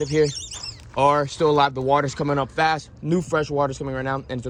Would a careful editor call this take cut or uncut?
uncut